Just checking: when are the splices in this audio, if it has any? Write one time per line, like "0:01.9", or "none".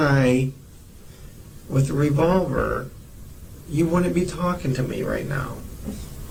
none